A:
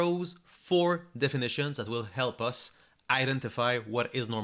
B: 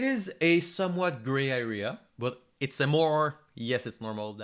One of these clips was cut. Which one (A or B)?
B